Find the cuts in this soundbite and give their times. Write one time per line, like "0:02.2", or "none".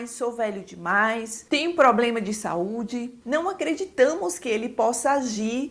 0:03.2